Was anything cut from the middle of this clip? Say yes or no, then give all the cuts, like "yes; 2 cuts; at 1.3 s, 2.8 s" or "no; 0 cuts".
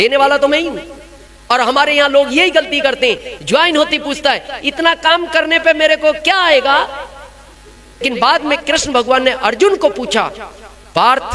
yes; 1 cut; at 8.0 s